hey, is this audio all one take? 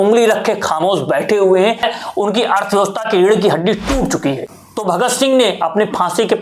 no; 2 cuts; at 1.8 s, 4.4 s

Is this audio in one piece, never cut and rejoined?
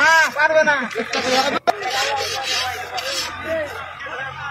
yes; 0 cuts

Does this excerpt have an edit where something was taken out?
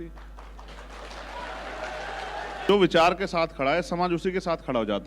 yes; 1 cut; at 2.7 s

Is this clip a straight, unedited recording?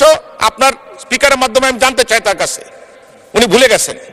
yes; 0 cuts

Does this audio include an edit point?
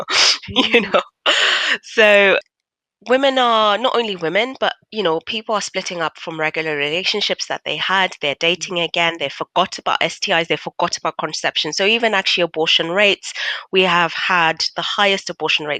yes; 1 cut; at 2.5 s

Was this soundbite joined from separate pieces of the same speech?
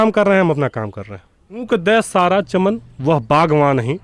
yes; 1 cut; at 1.7 s

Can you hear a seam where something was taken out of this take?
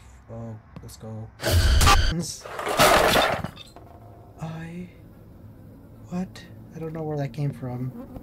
yes; 1 cut; at 2.1 s

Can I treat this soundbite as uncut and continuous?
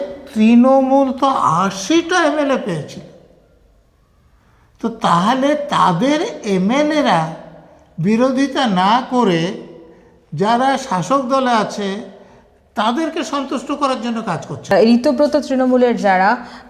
no; 1 cut; at 14.7 s

